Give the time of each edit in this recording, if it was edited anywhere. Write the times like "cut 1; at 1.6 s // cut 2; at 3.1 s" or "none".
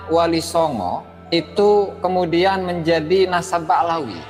cut 1; at 1.1 s